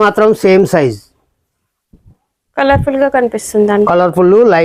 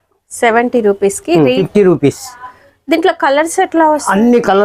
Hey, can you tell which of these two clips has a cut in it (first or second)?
second